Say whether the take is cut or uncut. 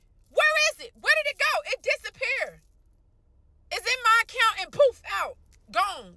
uncut